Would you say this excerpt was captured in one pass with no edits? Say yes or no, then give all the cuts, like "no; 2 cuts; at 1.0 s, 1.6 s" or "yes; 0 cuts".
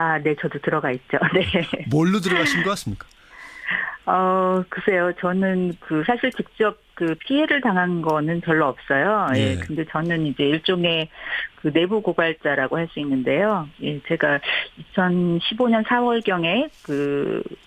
yes; 0 cuts